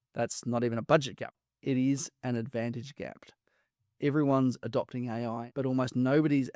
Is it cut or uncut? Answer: cut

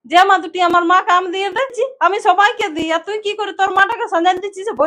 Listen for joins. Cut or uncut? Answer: cut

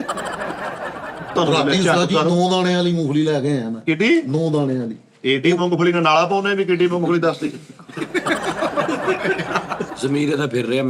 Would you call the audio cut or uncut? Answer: cut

